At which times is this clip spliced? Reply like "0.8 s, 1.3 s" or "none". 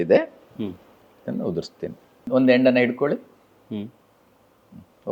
2.3 s